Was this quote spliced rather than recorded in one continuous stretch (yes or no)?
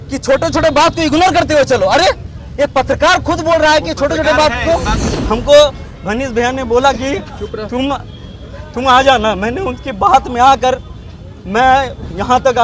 yes